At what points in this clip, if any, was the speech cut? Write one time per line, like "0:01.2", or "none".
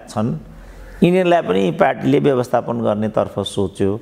none